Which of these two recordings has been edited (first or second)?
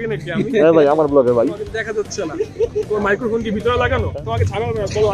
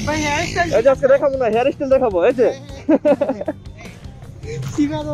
first